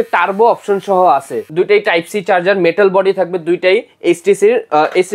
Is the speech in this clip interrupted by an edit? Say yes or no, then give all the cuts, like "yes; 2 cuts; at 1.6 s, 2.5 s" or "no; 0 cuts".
yes; 1 cut; at 1.4 s